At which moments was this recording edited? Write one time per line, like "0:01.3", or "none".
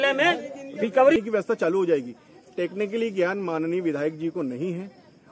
0:01.2